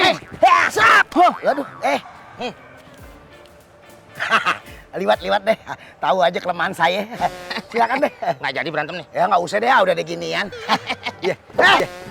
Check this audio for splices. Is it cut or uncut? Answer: uncut